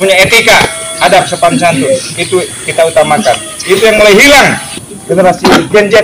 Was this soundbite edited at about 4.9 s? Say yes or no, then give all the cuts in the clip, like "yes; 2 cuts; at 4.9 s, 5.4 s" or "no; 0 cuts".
yes; 1 cut; at 4.9 s